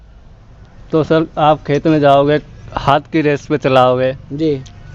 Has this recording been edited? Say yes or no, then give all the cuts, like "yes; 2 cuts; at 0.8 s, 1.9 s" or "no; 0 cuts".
no; 0 cuts